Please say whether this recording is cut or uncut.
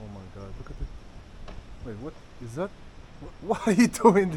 uncut